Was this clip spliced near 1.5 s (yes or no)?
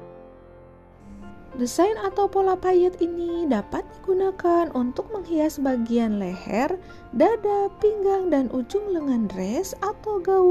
yes